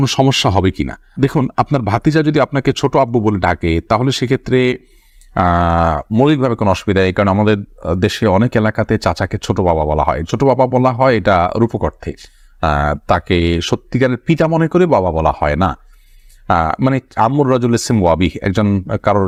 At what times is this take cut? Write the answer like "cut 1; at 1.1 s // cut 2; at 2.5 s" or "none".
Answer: none